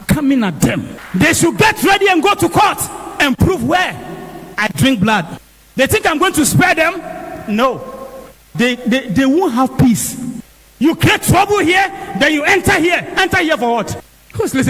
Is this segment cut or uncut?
uncut